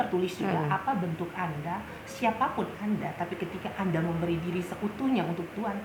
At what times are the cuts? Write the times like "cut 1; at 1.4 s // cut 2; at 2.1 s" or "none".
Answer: none